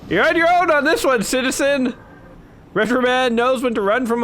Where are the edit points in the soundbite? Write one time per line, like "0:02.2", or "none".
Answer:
0:02.2